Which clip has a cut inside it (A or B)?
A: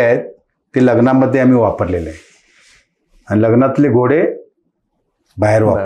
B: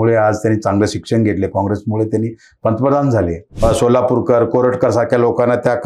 B